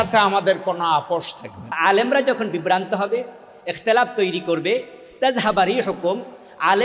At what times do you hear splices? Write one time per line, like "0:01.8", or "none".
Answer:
0:01.8